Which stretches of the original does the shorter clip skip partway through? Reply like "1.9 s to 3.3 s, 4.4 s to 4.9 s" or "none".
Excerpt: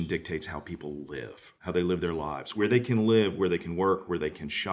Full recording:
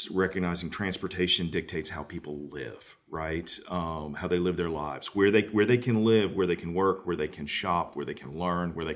3.0 s to 4.1 s, 5.1 s to 5.5 s